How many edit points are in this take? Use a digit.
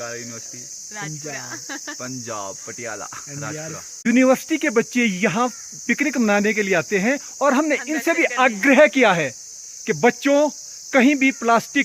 1